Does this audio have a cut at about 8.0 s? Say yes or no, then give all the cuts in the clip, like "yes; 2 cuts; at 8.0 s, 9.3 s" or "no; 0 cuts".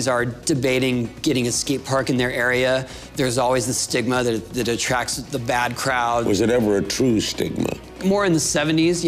yes; 2 cuts; at 6.2 s, 8.0 s